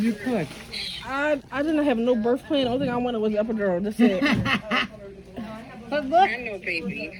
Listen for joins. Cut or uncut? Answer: uncut